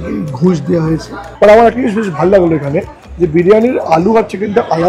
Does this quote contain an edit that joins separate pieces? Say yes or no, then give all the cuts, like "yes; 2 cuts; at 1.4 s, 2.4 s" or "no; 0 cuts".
yes; 1 cut; at 1.2 s